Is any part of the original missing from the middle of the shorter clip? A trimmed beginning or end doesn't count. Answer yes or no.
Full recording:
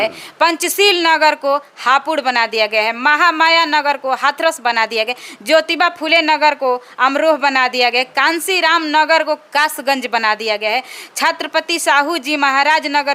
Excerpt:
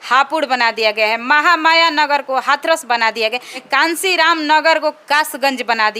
yes